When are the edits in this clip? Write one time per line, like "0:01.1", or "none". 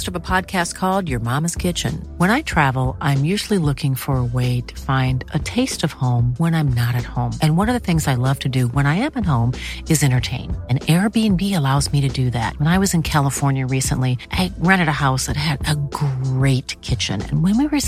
none